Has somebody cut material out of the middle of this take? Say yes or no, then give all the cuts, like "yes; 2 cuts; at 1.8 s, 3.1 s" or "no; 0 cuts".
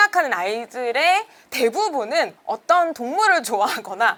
no; 0 cuts